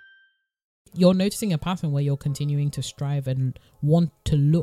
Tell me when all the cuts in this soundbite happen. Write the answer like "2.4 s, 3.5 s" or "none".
0.9 s